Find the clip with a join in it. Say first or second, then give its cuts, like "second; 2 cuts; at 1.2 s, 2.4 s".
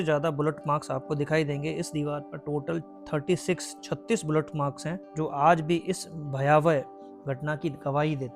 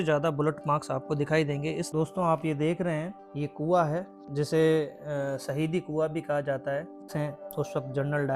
second; 2 cuts; at 1.9 s, 7.1 s